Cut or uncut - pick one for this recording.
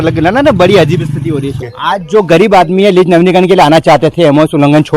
cut